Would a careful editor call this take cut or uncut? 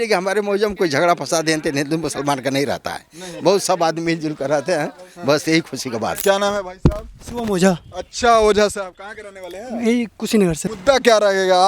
cut